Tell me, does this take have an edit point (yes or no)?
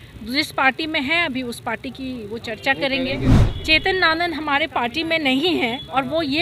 yes